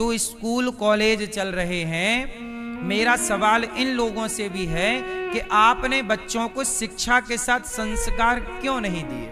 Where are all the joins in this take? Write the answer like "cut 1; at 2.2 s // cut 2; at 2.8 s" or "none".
none